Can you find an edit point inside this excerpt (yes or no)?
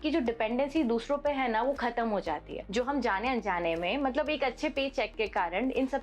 yes